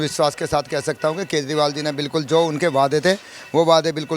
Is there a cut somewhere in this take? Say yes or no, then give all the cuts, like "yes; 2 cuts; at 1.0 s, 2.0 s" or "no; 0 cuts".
no; 0 cuts